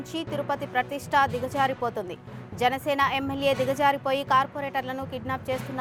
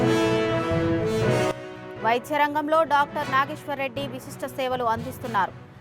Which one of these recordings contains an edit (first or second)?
second